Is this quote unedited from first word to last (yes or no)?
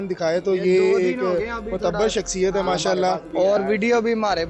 no